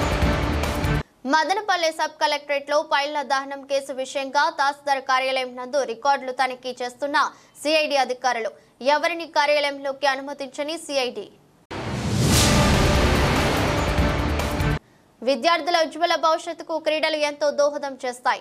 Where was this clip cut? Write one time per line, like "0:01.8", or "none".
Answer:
0:00.9

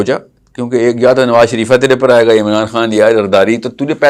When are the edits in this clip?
none

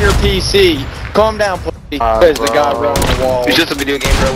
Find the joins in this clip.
0:02.0

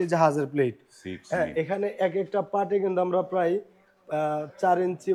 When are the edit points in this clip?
none

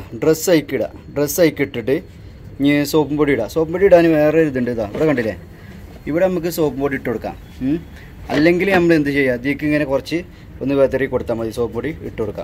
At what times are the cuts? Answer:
none

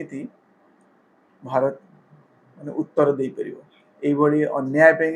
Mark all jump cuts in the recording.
none

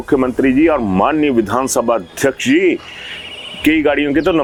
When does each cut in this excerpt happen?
none

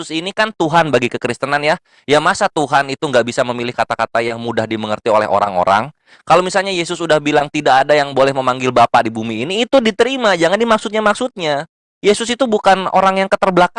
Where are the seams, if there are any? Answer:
none

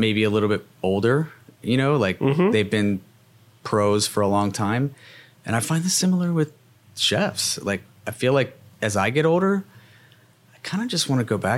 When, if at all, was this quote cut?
none

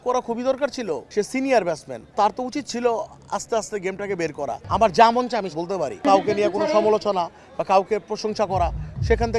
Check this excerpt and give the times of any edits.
0:01.0
0:04.6
0:06.0

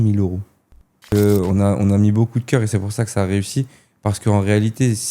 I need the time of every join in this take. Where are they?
0:01.0

